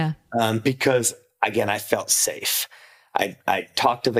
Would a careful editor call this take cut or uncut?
uncut